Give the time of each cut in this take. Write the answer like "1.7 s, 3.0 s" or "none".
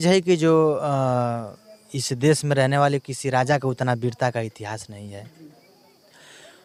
none